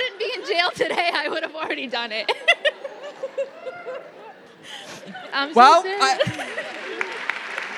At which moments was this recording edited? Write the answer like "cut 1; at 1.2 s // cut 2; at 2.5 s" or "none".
none